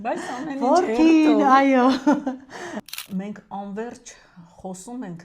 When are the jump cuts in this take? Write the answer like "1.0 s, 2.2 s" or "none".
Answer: 2.7 s